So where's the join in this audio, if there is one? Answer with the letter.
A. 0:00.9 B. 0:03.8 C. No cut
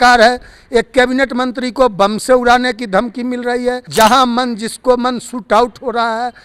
B